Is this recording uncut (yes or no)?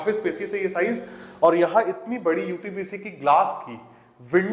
yes